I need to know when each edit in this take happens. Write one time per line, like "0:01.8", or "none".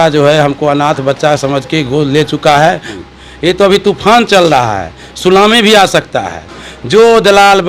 0:02.9

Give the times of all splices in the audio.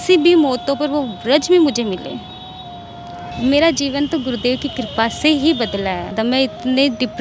0:03.2
0:06.1

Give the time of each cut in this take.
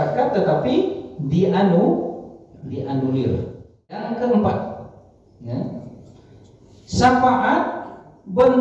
0:04.0

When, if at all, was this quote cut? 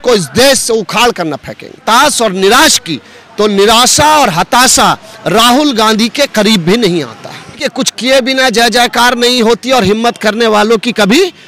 0:01.8
0:07.7

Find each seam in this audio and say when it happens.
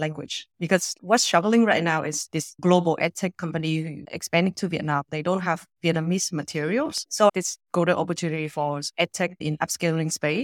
none

